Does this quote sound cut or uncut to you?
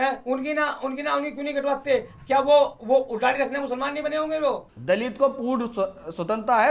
cut